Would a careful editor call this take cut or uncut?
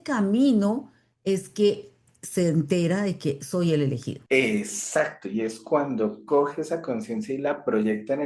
cut